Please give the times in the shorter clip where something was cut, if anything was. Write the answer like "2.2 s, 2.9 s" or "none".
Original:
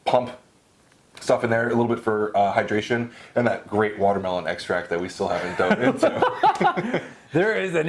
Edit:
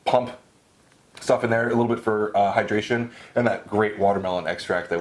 none

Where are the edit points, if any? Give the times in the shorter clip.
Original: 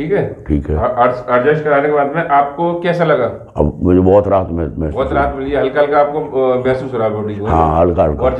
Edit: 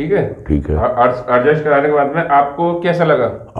none

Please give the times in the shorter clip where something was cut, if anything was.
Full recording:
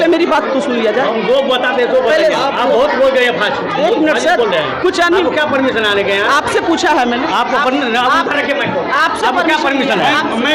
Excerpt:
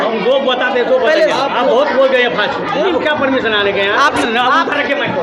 2.8 s, 4.2 s

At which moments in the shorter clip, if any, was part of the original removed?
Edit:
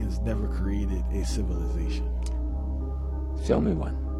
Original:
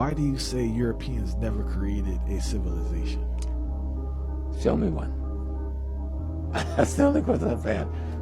none

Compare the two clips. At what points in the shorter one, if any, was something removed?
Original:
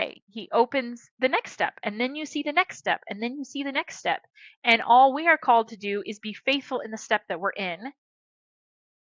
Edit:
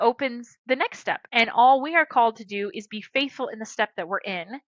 1.2 s

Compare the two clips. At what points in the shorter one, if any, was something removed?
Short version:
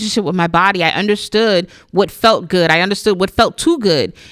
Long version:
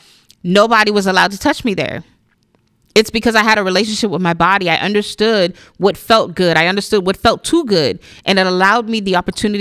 none

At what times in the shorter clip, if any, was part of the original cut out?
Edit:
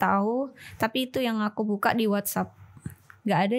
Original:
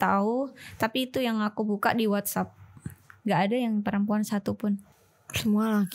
none

